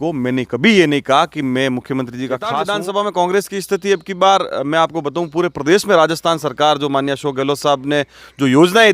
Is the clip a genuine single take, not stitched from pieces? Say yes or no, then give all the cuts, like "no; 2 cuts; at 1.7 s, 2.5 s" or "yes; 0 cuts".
no; 1 cut; at 2.5 s